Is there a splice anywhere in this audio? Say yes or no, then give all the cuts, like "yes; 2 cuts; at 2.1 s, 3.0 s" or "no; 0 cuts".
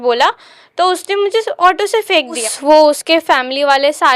yes; 1 cut; at 2.4 s